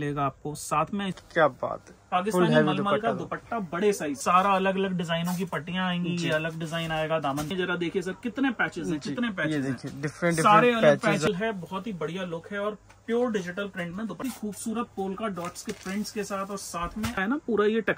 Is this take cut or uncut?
cut